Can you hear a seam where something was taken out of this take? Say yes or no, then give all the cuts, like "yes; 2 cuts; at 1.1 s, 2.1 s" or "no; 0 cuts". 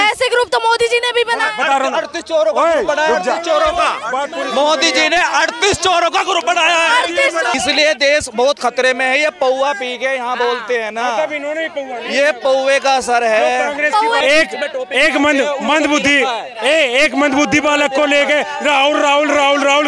yes; 2 cuts; at 7.5 s, 14.2 s